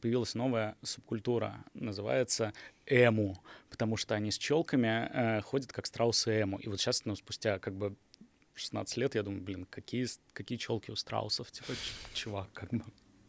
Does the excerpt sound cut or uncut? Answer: uncut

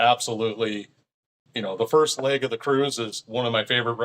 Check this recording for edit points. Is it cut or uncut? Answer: cut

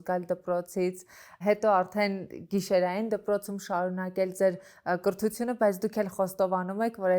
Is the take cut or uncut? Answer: uncut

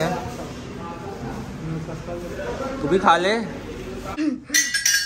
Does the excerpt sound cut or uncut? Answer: cut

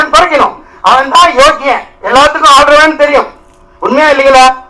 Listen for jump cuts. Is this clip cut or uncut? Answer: uncut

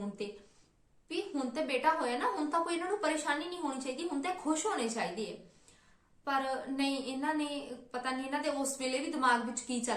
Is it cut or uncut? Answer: uncut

